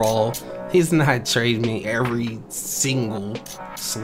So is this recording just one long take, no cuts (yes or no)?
yes